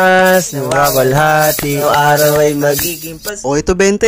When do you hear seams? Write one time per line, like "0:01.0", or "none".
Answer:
0:01.8